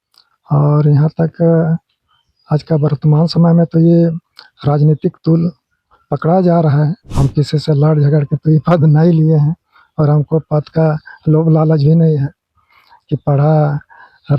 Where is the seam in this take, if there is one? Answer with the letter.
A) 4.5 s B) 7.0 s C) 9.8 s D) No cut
B